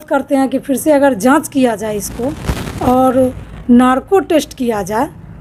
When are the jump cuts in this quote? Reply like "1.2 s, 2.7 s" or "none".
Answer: none